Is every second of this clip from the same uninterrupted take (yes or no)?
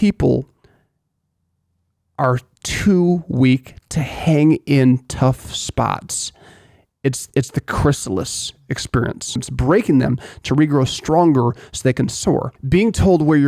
no